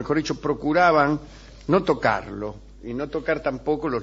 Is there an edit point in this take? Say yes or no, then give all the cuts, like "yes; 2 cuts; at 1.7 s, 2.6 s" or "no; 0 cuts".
no; 0 cuts